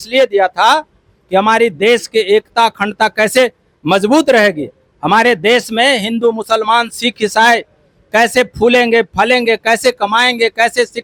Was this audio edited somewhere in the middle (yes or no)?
no